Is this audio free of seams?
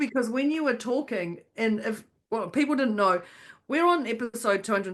yes; 0 cuts

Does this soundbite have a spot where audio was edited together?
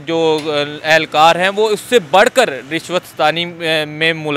no; 0 cuts

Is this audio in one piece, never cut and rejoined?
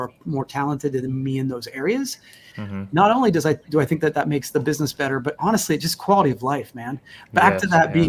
yes; 0 cuts

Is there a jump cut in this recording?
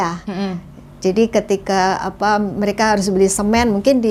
no; 0 cuts

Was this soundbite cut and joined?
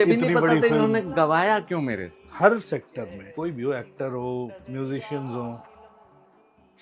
yes; 1 cut; at 2.1 s

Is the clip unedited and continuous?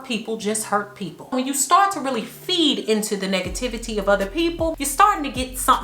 no; 2 cuts; at 1.3 s, 4.8 s

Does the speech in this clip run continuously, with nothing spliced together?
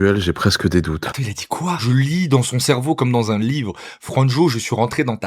no; 1 cut; at 1.8 s

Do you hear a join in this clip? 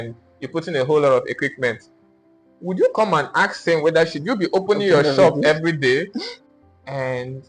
yes; 1 cut; at 6.3 s

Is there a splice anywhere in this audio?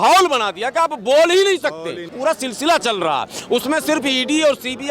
yes; 1 cut; at 2.0 s

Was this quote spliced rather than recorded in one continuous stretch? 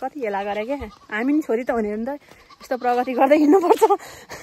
no; 0 cuts

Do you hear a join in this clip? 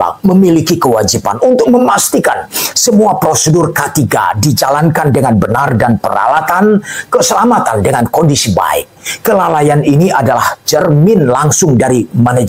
no; 0 cuts

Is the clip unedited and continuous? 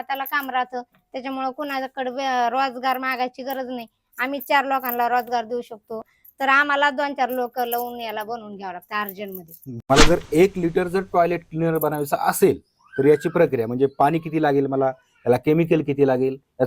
no; 2 cuts; at 6.1 s, 9.8 s

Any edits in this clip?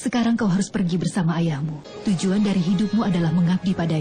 no; 0 cuts

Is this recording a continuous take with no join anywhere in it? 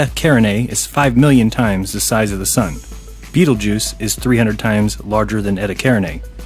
no; 1 cut; at 1.3 s

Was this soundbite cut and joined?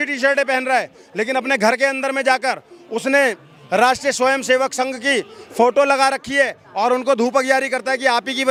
no; 0 cuts

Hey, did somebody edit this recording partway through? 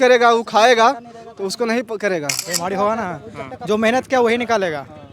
yes; 1 cut; at 2.5 s

